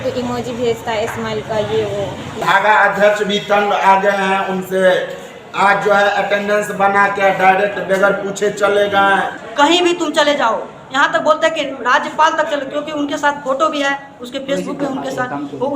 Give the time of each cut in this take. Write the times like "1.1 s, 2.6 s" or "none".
2.3 s, 9.4 s